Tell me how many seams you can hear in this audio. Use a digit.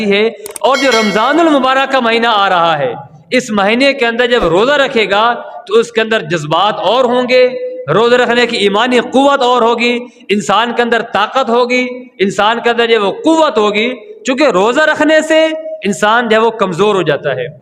0